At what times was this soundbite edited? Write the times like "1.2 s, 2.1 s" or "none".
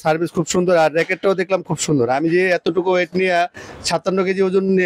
none